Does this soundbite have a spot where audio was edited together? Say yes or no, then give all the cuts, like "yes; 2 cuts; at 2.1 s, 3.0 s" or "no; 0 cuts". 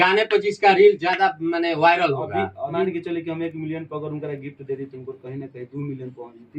yes; 1 cut; at 2.8 s